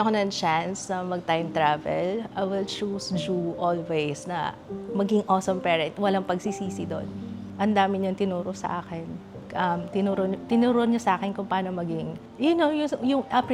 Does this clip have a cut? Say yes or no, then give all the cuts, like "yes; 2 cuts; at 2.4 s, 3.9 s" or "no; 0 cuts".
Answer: no; 0 cuts